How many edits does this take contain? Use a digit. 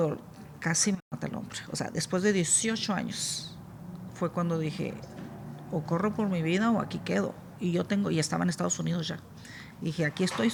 0